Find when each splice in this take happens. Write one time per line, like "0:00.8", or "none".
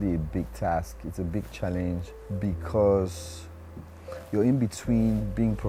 none

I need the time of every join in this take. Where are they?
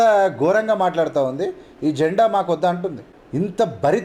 0:03.1

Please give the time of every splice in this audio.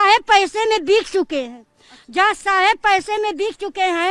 none

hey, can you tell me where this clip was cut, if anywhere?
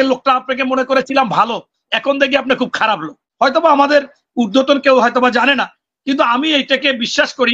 0:03.2

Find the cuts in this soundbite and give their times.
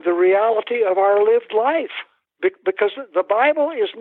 none

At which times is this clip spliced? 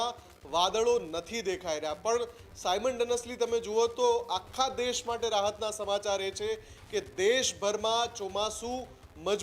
none

